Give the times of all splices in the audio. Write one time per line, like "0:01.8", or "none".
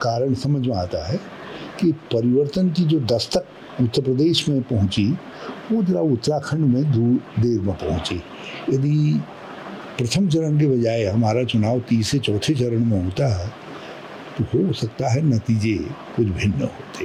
none